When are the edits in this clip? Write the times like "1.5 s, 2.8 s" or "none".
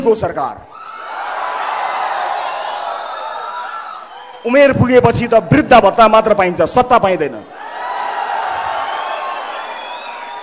none